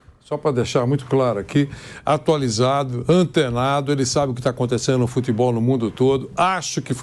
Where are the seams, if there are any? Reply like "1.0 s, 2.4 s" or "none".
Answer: none